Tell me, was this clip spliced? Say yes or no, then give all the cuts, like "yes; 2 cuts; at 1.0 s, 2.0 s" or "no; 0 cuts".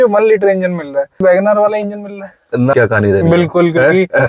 yes; 2 cuts; at 1.2 s, 2.7 s